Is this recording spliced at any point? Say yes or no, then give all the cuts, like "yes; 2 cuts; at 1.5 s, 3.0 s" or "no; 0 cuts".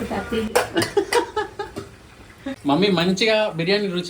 yes; 1 cut; at 2.5 s